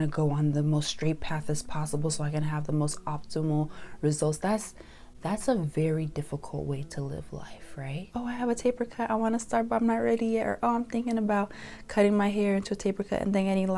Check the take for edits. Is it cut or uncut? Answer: cut